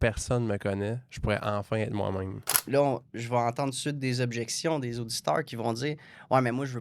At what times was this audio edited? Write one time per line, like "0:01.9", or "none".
0:02.5